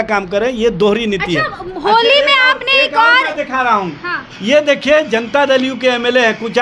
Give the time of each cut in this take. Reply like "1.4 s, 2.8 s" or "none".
none

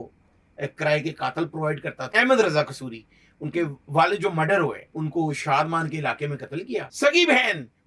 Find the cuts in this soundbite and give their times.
2.0 s, 4.8 s, 6.9 s

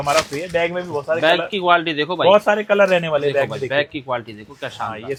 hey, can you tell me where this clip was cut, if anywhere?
none

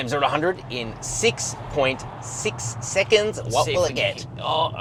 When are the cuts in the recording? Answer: none

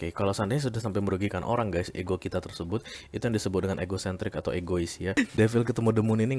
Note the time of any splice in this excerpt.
5.2 s

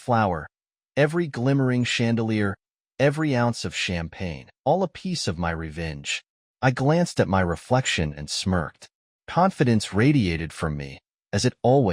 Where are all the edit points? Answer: 4.4 s

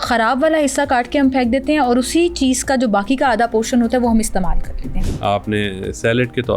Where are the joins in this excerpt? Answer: 4.9 s

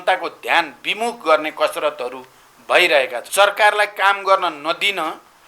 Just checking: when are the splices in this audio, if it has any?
3.2 s

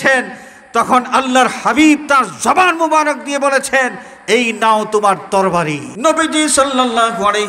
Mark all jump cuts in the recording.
5.9 s

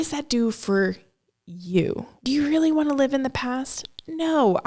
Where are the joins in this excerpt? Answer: 2.2 s

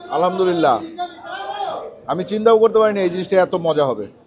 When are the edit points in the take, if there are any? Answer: none

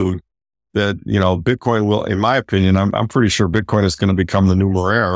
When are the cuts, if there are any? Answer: none

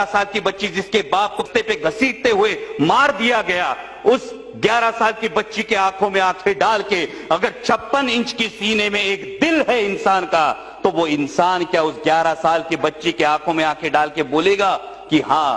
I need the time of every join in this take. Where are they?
1.4 s

